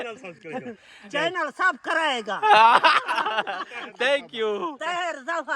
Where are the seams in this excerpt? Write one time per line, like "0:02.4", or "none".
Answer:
none